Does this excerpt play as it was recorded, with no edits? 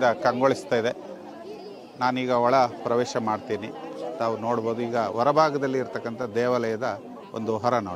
yes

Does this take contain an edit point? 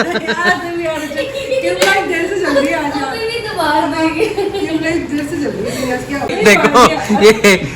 yes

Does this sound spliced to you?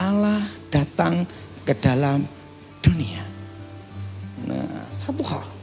no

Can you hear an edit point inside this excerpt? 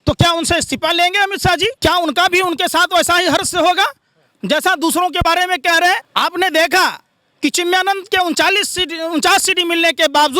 yes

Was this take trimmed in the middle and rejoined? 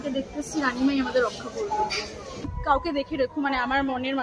yes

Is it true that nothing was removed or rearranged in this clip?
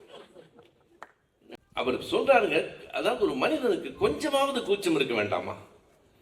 no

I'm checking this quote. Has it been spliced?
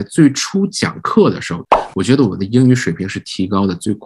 yes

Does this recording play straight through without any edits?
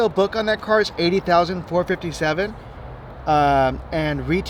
yes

